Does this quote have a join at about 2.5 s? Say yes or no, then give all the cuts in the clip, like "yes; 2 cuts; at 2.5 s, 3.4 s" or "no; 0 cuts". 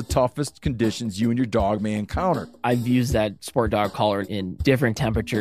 yes; 2 cuts; at 2.5 s, 4.3 s